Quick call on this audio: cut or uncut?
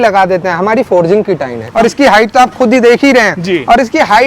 cut